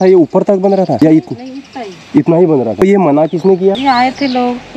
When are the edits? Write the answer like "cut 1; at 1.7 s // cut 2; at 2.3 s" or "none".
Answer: cut 1; at 1.0 s // cut 2; at 2.8 s // cut 3; at 3.8 s